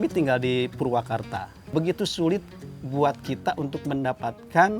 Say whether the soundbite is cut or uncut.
uncut